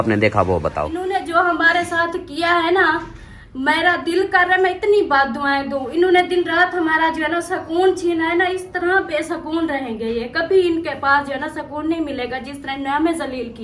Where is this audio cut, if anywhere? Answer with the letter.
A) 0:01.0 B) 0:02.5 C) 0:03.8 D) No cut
A